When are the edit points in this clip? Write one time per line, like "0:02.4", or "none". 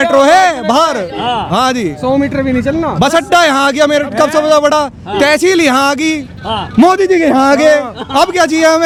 none